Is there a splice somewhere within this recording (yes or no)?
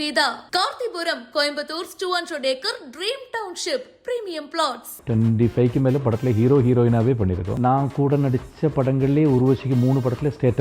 yes